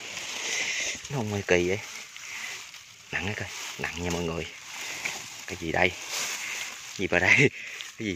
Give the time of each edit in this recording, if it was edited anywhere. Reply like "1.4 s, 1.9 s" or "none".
1.1 s